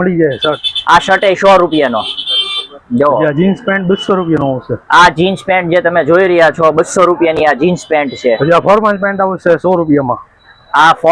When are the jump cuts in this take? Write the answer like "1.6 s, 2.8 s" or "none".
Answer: none